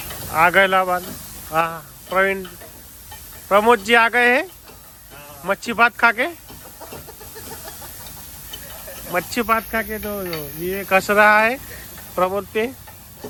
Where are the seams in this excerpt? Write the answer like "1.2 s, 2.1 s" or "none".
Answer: none

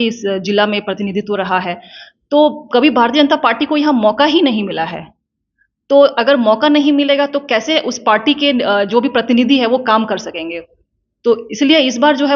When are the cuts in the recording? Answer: none

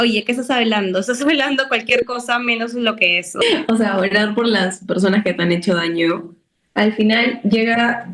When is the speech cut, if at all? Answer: 3.4 s

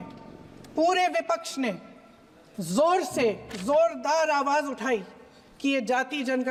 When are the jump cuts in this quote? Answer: none

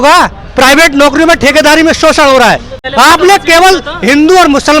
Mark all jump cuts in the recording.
2.8 s

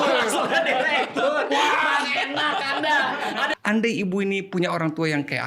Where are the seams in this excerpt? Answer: 3.5 s

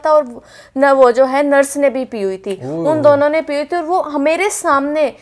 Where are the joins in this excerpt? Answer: none

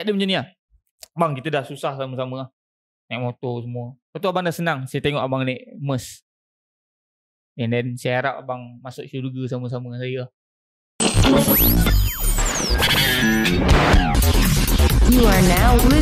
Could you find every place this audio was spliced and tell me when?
10.3 s

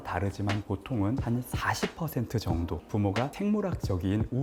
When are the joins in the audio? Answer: none

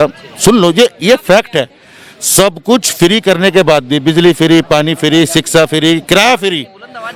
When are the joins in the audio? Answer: none

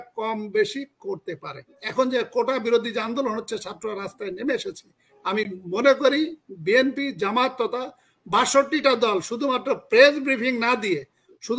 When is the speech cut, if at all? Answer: 1.8 s

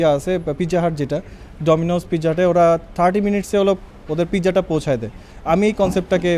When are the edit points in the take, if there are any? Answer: none

